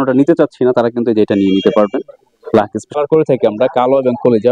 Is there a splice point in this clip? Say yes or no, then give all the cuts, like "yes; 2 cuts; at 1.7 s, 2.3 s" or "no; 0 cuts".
yes; 1 cut; at 3.0 s